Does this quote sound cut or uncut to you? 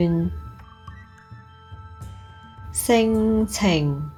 uncut